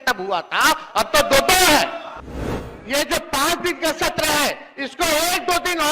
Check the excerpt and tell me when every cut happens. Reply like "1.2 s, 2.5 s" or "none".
2.4 s